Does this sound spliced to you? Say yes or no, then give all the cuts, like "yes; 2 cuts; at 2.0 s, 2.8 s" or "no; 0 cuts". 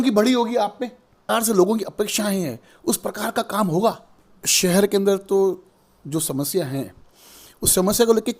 yes; 2 cuts; at 1.2 s, 4.4 s